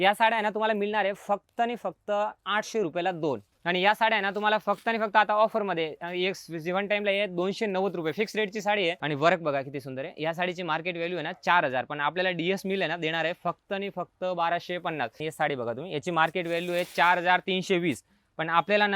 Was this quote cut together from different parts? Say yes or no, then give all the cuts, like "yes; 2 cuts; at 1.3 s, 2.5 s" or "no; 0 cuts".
yes; 3 cuts; at 3.5 s, 9.0 s, 15.2 s